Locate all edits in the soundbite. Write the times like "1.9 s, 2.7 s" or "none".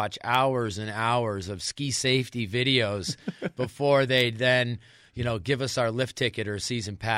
none